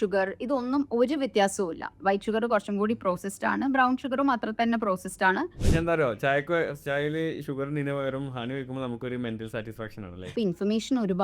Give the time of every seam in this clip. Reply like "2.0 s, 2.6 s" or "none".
5.6 s, 10.3 s